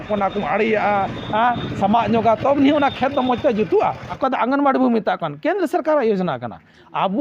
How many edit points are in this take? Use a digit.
1